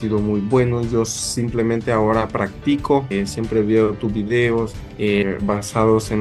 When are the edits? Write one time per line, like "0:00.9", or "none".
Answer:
none